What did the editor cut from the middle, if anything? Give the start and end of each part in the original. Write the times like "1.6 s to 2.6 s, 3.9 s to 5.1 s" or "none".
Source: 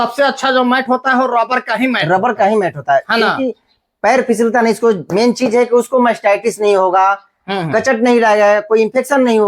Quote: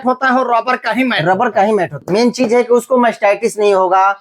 2.8 s to 5.0 s